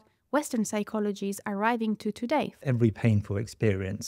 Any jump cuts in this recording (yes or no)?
yes